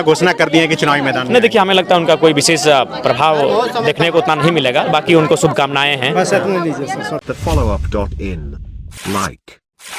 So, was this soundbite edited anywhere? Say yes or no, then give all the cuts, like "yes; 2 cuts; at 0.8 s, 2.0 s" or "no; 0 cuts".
no; 0 cuts